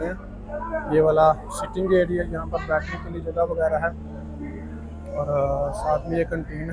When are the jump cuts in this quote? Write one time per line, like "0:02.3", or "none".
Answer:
none